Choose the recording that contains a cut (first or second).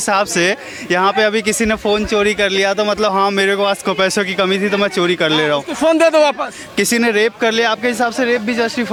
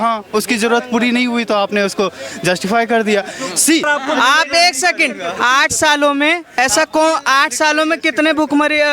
second